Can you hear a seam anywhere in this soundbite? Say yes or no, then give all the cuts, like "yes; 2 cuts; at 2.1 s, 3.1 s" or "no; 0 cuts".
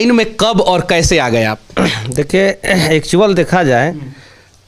no; 0 cuts